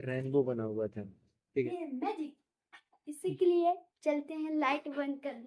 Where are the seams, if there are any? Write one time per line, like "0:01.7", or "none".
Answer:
0:01.7